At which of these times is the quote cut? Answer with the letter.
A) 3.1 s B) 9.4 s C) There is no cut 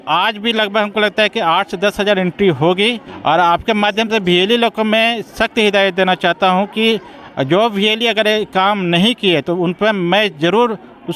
A